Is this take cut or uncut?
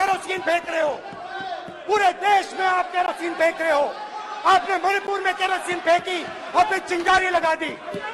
uncut